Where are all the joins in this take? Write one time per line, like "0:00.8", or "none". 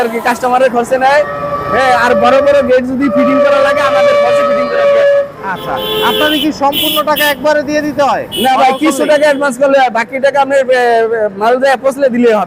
none